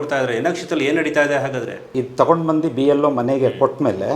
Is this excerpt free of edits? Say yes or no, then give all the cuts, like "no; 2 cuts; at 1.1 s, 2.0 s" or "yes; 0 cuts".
no; 1 cut; at 1.8 s